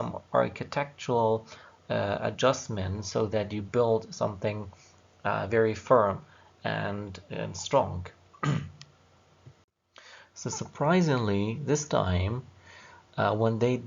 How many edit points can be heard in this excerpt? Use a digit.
1